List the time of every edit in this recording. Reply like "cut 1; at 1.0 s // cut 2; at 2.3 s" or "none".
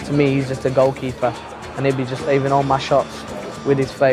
none